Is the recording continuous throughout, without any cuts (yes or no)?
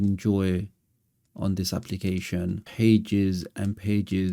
no